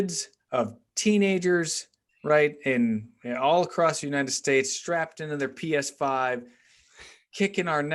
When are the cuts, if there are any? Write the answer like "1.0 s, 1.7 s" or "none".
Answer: none